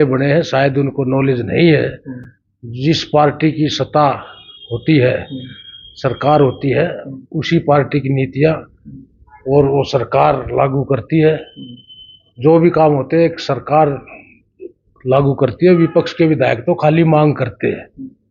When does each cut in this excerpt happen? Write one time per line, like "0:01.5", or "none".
none